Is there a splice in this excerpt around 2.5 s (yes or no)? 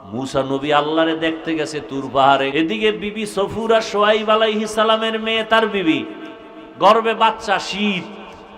yes